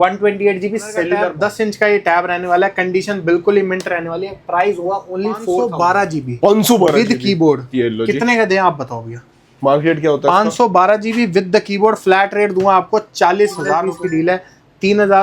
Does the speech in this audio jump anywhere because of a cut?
yes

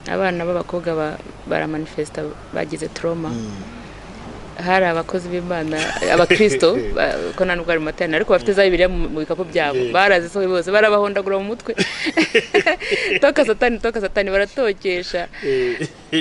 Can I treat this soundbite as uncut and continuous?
yes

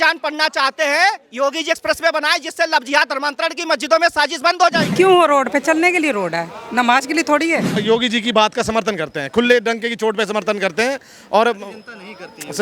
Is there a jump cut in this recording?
yes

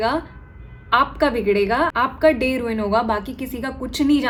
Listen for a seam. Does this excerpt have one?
no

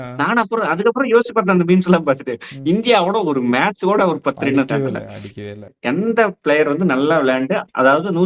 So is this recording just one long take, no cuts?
no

